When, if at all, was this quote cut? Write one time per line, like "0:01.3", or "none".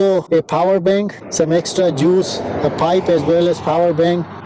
none